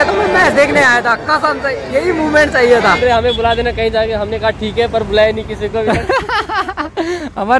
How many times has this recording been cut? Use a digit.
1